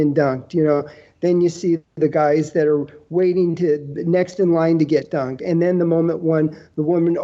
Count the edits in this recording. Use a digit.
1